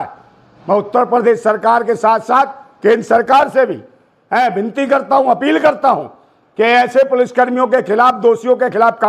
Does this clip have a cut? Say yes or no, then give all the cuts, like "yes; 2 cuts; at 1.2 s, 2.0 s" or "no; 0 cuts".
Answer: no; 0 cuts